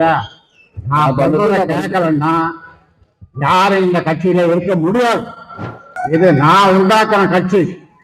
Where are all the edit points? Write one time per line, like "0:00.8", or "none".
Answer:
0:05.9